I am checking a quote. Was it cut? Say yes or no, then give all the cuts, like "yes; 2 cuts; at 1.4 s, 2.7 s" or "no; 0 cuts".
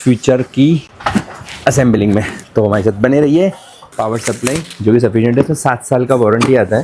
yes; 1 cut; at 3.8 s